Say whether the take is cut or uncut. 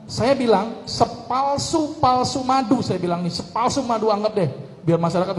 uncut